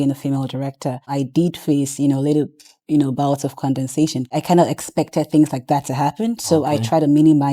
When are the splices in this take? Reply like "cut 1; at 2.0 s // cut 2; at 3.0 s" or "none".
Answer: cut 1; at 1.0 s // cut 2; at 4.3 s